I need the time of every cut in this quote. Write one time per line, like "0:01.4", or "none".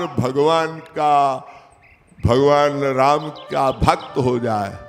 none